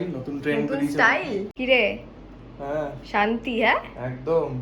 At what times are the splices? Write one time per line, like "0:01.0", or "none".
0:01.5